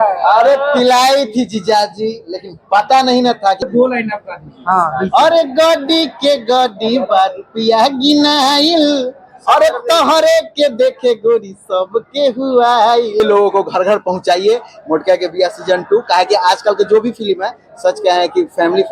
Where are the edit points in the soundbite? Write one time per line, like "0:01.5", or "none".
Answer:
0:03.6
0:13.2